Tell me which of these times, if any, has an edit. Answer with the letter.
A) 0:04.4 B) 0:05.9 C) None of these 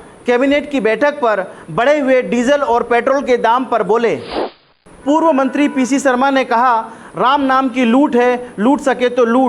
A